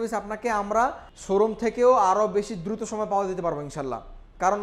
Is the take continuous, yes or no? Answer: no